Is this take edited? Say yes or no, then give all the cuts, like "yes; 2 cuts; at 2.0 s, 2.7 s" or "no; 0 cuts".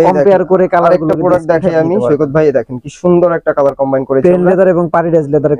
no; 0 cuts